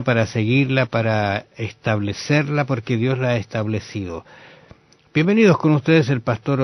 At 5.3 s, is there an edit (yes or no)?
yes